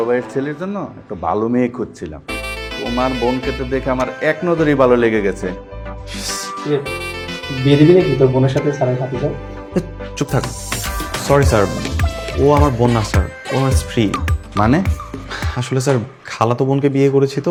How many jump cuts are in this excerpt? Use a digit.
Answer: 0